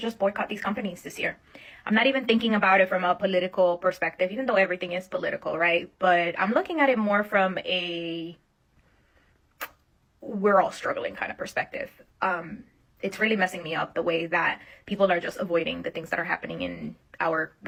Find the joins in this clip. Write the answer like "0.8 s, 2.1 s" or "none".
none

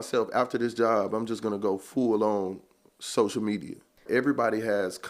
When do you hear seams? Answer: 4.0 s

